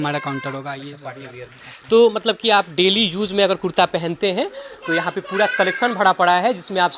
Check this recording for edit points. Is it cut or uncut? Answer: uncut